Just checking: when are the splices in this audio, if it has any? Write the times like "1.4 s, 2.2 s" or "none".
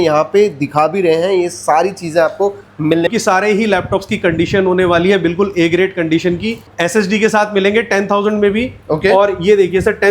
3.1 s, 6.7 s